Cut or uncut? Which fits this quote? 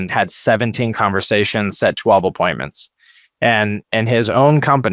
uncut